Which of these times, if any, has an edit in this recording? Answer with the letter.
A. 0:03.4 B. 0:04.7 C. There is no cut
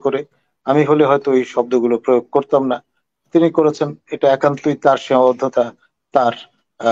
C